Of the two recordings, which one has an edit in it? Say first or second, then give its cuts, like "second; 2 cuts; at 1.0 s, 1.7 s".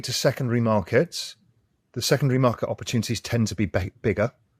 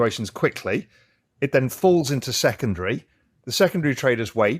second; 1 cut; at 1.5 s